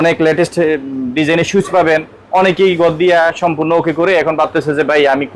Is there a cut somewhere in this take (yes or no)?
no